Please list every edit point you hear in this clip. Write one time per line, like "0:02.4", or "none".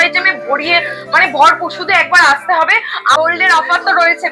0:03.1